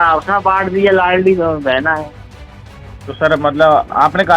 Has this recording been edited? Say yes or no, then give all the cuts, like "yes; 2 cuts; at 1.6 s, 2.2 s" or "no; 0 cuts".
no; 0 cuts